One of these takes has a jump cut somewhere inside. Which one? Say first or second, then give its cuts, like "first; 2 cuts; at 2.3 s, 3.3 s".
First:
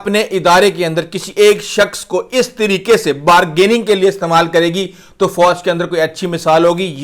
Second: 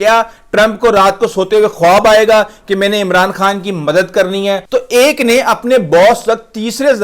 second; 1 cut; at 4.6 s